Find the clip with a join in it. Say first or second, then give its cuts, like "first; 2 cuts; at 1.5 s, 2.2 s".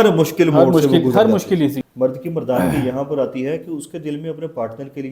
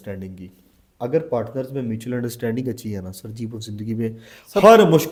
first; 1 cut; at 1.8 s